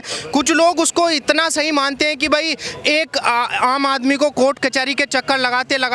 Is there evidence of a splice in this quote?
no; 0 cuts

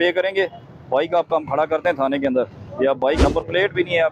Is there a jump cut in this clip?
yes; 1 cut; at 3.2 s

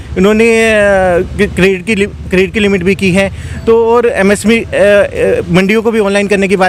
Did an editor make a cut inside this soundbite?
no; 0 cuts

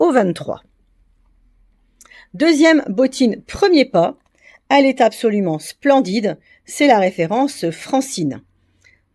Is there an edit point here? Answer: no; 0 cuts

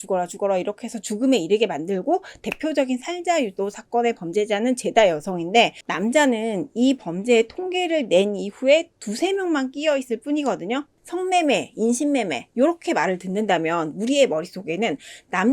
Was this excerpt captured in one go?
no; 1 cut; at 10.9 s

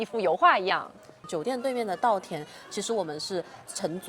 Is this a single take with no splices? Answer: no; 1 cut; at 1.2 s

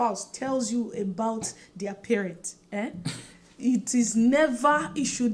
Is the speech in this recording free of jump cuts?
yes; 0 cuts

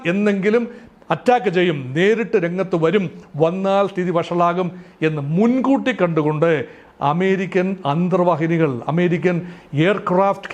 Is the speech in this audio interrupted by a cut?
no; 0 cuts

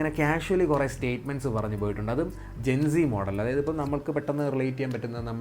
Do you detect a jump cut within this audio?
no; 0 cuts

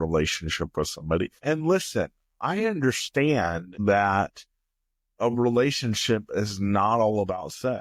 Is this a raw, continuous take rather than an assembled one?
no; 2 cuts; at 1.3 s, 3.7 s

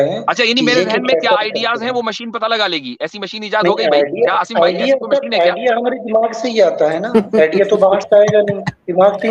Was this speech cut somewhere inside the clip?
no; 0 cuts

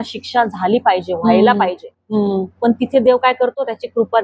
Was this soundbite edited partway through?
no; 0 cuts

